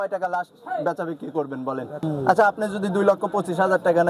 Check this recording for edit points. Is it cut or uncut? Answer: cut